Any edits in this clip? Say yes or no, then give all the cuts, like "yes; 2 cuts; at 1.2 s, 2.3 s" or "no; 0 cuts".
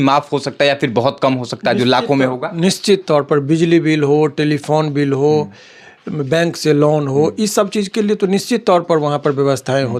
no; 0 cuts